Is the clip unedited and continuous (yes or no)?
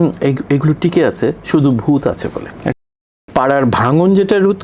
no